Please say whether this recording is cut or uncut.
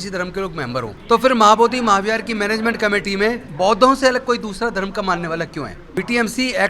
cut